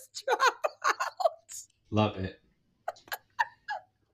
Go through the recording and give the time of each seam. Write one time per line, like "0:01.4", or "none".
none